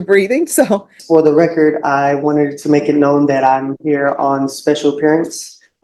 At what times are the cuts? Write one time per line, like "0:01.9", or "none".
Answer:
0:00.9

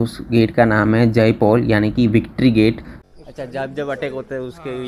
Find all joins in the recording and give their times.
0:02.9

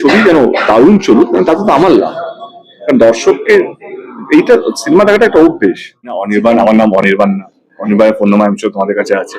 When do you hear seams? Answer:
0:06.3

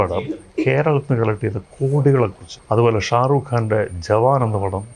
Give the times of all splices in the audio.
0:02.5

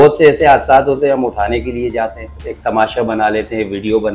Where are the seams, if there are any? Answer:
0:02.4

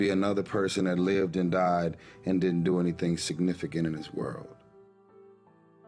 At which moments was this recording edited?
0:04.5

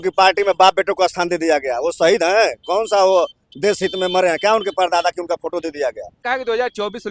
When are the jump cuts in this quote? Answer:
0:06.1

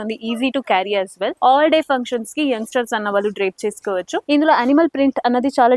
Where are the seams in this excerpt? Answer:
0:01.3
0:04.2

